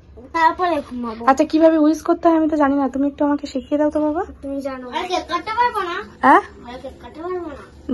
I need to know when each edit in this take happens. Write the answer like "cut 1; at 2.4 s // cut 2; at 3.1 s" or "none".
cut 1; at 4.9 s